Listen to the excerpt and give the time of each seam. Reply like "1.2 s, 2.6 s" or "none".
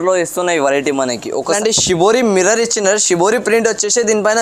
1.6 s